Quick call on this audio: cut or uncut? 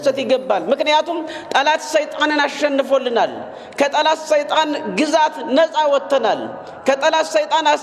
uncut